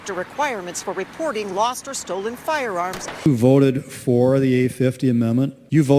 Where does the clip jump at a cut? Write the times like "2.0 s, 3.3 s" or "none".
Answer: 3.1 s